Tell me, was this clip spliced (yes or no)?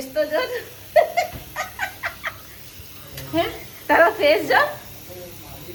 no